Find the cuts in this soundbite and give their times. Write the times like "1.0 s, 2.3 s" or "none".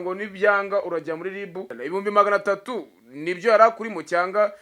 1.7 s